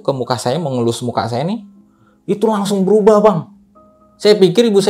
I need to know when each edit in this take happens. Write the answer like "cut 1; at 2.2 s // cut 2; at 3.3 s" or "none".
cut 1; at 1.8 s